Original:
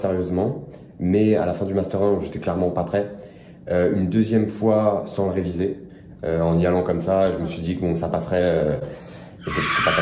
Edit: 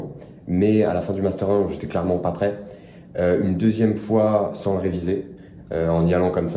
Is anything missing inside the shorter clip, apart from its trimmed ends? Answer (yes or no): no